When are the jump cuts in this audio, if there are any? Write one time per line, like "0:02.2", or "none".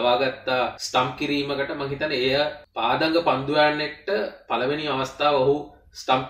0:02.6